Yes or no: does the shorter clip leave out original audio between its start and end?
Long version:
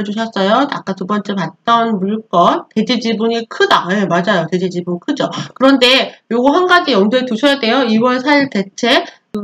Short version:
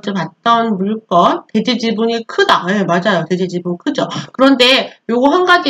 no